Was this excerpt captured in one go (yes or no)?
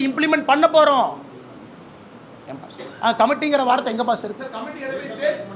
yes